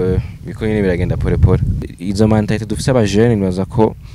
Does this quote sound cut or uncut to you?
cut